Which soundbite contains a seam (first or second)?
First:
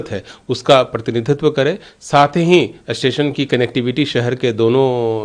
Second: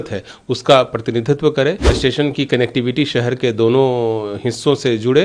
second